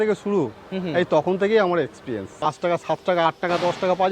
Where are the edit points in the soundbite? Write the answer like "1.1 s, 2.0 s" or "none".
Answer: 2.4 s